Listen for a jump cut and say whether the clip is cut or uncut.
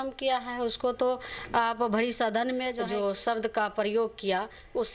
cut